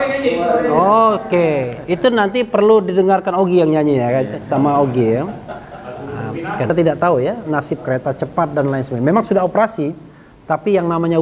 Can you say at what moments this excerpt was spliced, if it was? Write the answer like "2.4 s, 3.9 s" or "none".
6.7 s